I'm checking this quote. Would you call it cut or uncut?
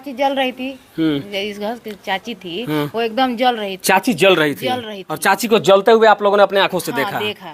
uncut